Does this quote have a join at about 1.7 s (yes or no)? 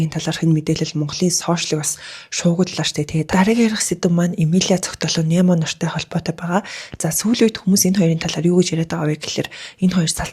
no